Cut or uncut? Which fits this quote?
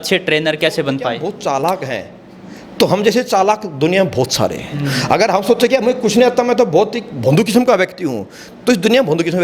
cut